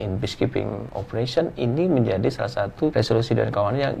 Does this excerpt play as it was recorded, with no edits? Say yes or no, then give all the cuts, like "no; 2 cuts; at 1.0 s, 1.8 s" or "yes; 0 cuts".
no; 2 cuts; at 0.9 s, 2.9 s